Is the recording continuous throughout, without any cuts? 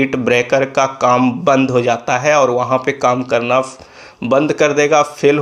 yes; 0 cuts

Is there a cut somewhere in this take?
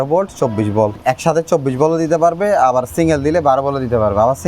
yes; 1 cut; at 1.0 s

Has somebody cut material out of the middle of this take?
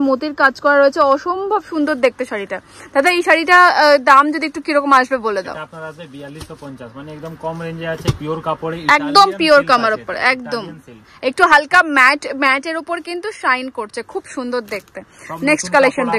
no; 0 cuts

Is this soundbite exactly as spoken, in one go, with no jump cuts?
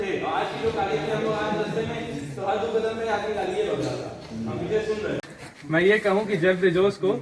no; 1 cut; at 5.3 s

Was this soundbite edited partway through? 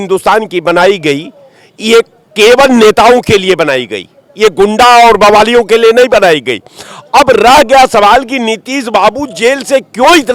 no; 0 cuts

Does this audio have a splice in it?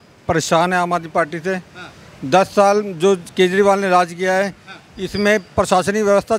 no; 0 cuts

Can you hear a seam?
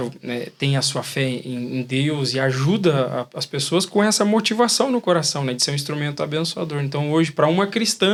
no; 0 cuts

